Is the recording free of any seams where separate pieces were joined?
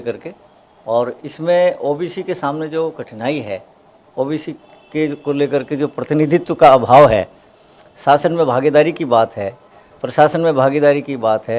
yes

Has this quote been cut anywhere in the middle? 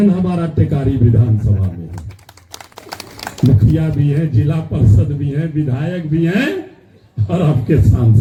no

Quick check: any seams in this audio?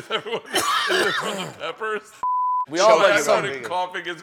yes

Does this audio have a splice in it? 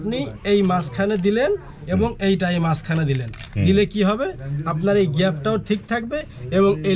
no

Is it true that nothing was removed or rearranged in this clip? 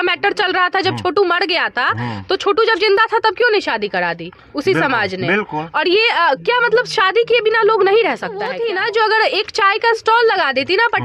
no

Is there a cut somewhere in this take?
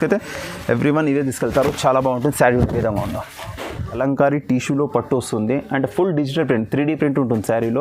yes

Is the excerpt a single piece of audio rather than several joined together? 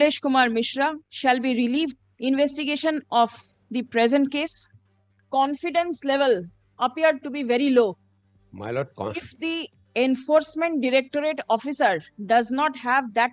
no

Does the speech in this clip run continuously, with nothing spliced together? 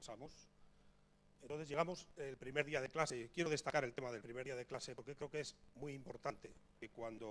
yes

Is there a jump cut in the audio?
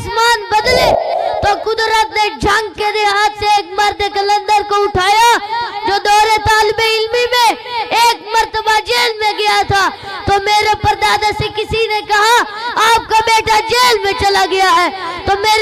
yes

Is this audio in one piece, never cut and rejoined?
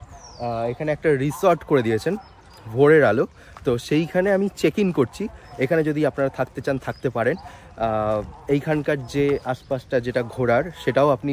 yes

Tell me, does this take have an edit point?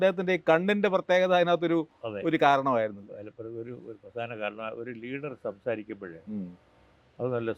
no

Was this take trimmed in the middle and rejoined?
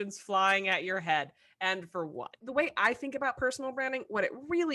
yes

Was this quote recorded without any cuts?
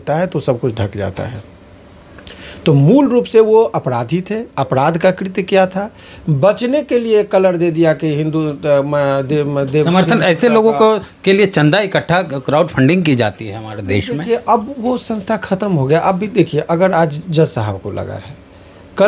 yes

